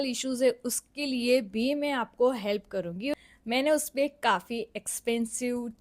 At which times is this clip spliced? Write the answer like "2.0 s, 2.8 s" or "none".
3.1 s

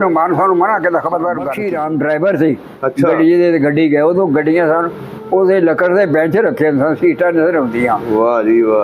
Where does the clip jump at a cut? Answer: 1.6 s

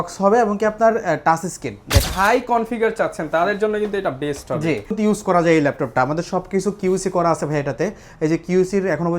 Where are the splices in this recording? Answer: 2.1 s, 4.9 s

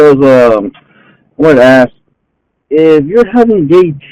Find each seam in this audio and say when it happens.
none

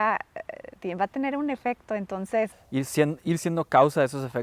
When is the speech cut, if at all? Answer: 2.6 s

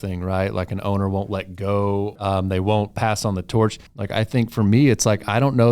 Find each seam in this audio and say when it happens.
2.2 s, 3.9 s

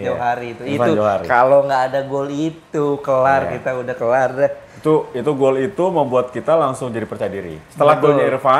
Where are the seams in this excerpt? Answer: none

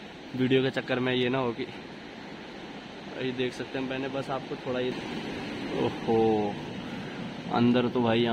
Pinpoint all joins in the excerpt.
5.0 s

